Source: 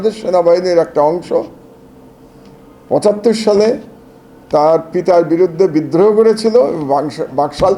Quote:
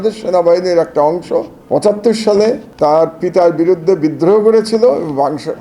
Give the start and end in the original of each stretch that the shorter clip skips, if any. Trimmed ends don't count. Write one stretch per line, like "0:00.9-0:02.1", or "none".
0:01.6-0:02.8
0:03.9-0:04.4

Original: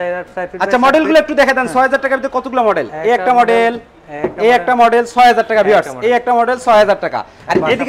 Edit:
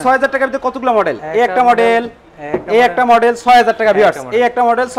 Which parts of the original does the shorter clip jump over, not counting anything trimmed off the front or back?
none

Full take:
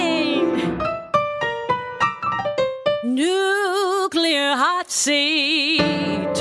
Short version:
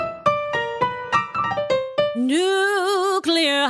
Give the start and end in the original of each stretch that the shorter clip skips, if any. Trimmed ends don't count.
none

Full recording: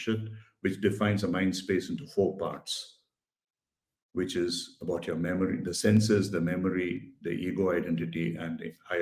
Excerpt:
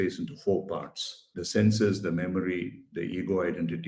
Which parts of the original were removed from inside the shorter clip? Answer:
0:03.1-0:05.7

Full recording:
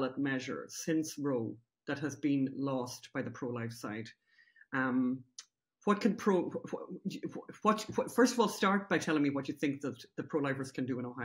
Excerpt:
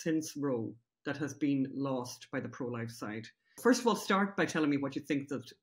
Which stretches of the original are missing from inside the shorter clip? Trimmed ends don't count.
0:04.4-0:08.1

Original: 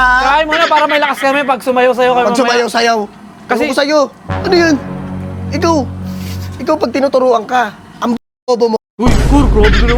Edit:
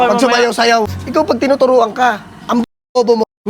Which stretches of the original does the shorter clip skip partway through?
0:03.1-0:06.5

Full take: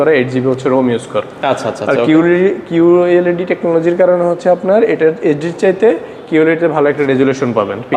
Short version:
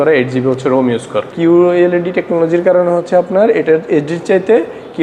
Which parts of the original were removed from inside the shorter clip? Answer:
0:01.3-0:02.6

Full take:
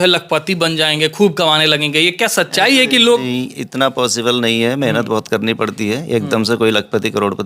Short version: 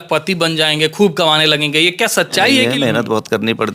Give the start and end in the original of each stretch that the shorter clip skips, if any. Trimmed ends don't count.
0:02.8-0:04.6

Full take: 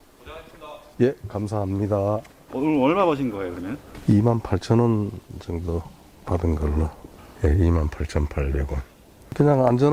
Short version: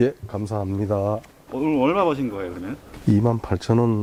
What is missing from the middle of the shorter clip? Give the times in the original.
none

